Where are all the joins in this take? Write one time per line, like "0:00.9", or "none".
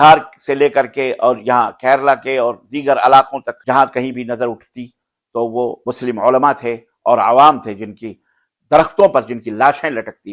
0:03.5
0:05.8